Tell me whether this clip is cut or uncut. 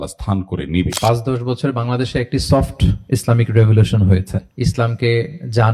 cut